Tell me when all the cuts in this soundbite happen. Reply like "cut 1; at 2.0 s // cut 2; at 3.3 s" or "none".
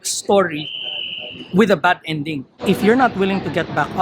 cut 1; at 2.5 s